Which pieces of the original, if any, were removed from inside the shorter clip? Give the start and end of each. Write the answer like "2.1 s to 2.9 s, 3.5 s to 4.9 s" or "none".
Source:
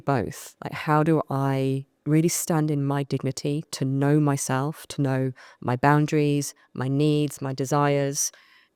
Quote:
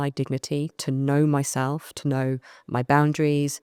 none